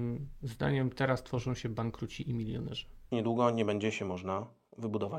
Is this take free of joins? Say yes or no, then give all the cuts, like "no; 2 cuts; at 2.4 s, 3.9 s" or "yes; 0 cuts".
no; 1 cut; at 3.0 s